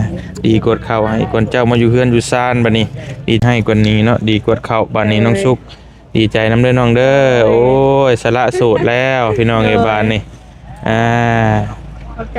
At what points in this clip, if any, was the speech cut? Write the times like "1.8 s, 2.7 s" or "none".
3.4 s